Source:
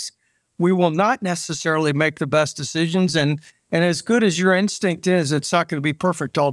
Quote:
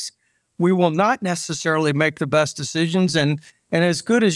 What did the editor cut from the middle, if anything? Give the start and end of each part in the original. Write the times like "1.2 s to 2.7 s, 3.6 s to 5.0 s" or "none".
none